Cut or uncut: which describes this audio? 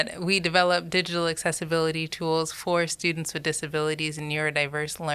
uncut